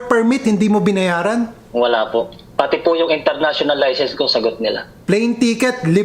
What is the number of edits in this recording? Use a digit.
3